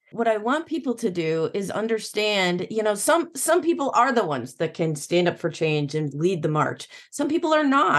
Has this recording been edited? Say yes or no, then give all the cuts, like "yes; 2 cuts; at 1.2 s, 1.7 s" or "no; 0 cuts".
no; 0 cuts